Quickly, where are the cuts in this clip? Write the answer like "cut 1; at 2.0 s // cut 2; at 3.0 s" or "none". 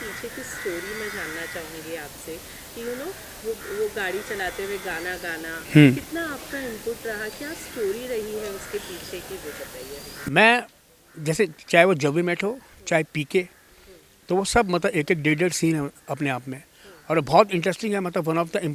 none